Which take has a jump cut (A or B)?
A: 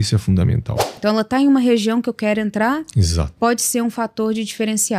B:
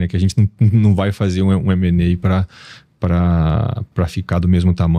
A